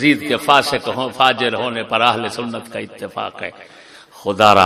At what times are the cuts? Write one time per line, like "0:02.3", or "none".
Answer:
none